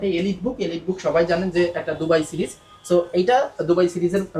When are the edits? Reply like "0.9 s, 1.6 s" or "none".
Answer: none